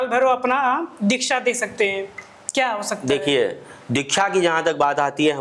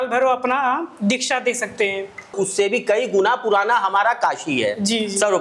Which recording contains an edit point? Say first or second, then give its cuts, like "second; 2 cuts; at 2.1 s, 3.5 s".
second; 1 cut; at 2.3 s